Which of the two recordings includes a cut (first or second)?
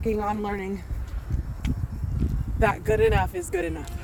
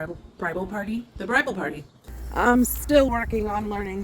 second